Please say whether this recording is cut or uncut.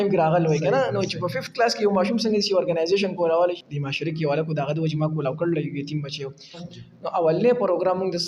cut